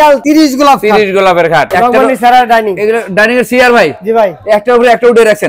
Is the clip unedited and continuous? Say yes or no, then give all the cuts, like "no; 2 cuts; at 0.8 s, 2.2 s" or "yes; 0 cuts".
no; 1 cut; at 1.7 s